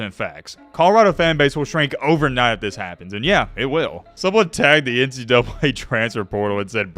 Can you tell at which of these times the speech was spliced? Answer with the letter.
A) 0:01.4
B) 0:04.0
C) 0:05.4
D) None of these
B